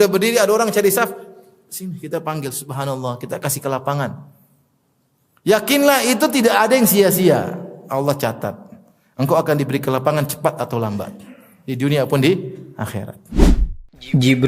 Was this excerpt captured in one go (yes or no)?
no